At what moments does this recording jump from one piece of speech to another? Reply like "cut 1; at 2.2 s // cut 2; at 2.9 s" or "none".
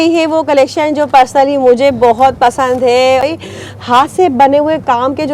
cut 1; at 3.2 s